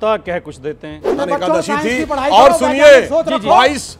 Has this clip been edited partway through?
yes; 1 cut; at 1.1 s

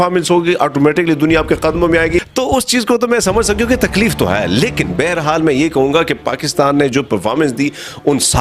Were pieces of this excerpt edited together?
yes; 1 cut; at 2.3 s

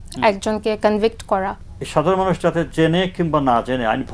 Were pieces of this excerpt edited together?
yes; 1 cut; at 1.6 s

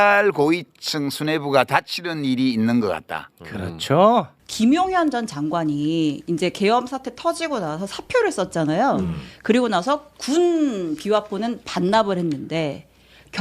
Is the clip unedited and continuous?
no; 1 cut; at 4.4 s

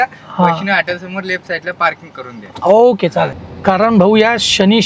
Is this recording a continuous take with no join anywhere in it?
no; 1 cut; at 3.4 s

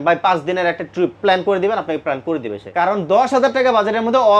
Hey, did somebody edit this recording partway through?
yes; 2 cuts; at 1.2 s, 2.6 s

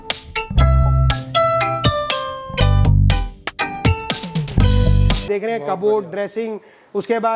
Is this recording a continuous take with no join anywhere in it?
no; 2 cuts; at 2.1 s, 5.2 s

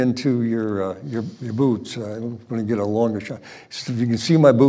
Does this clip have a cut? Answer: no; 0 cuts

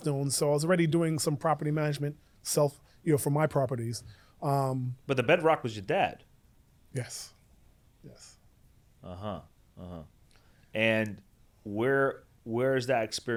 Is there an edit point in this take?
no; 0 cuts

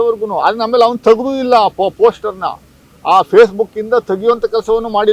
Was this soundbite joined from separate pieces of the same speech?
no; 0 cuts

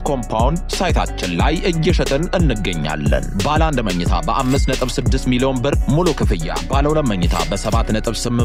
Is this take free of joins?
yes; 0 cuts

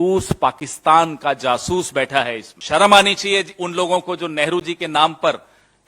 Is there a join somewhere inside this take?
yes; 1 cut; at 2.5 s

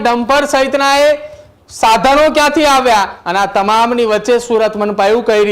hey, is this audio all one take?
no; 1 cut; at 3.2 s

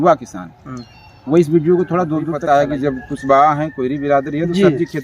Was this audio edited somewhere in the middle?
yes; 1 cut; at 2.3 s

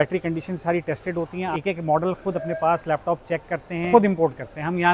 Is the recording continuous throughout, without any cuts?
no; 2 cuts; at 1.5 s, 3.9 s

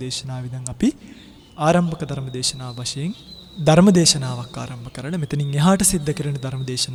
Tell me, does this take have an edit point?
no; 0 cuts

